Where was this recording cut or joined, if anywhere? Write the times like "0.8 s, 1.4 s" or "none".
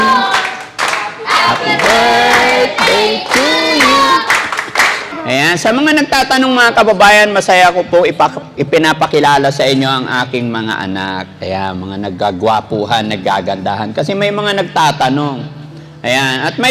5.1 s

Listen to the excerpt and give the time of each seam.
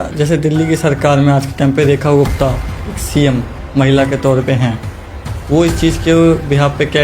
none

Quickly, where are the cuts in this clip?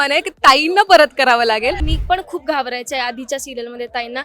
1.9 s

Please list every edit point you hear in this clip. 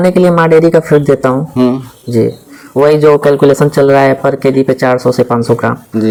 none

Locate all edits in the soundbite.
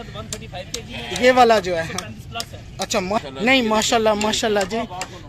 3.2 s

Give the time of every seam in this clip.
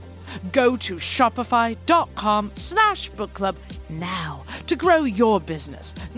none

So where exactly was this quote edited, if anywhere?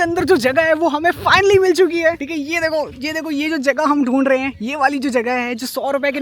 none

